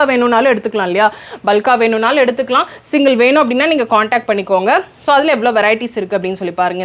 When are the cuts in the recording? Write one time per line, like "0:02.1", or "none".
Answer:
none